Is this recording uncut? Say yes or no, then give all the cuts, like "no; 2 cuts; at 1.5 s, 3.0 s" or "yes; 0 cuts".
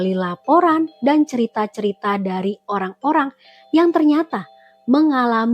yes; 0 cuts